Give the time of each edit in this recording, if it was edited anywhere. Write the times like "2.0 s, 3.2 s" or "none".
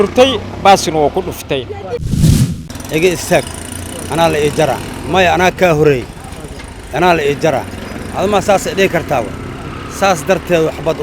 2.3 s